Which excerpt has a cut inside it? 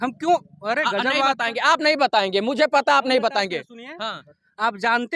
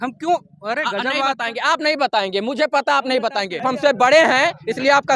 second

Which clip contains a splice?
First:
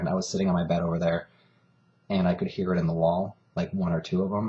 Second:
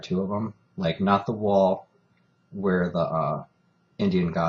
first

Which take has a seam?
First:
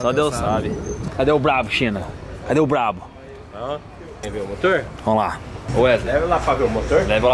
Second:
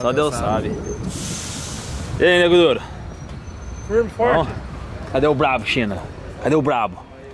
first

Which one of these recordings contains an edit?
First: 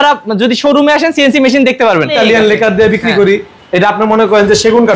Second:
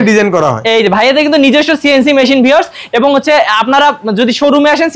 first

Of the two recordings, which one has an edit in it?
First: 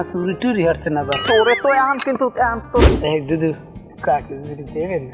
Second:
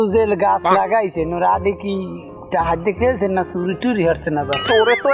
first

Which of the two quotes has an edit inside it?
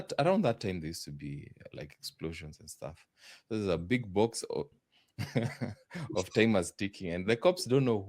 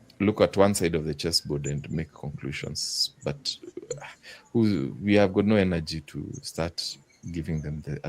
first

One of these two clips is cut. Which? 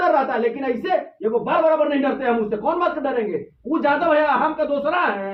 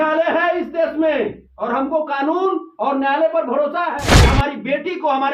second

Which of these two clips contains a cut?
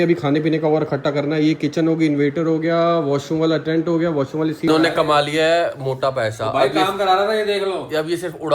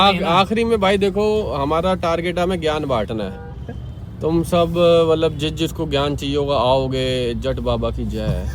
first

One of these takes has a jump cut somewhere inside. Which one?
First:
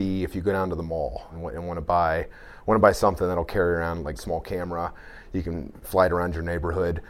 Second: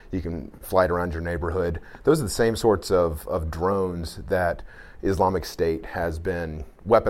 first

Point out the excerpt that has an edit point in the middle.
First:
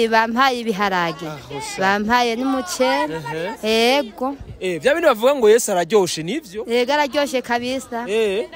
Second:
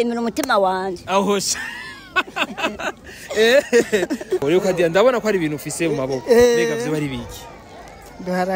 second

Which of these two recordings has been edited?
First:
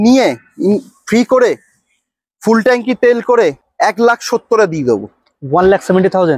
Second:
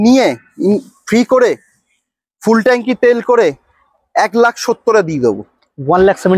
first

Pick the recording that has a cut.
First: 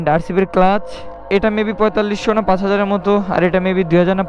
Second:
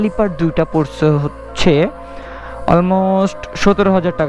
first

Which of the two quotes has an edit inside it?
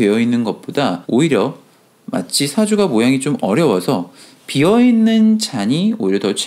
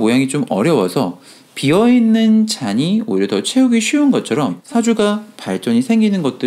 second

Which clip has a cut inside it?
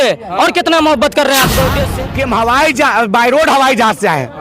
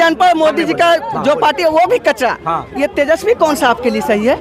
first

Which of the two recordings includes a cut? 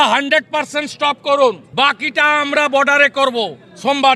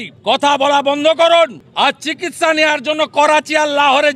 first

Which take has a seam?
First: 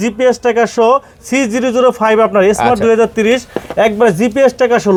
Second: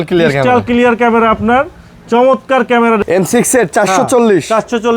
second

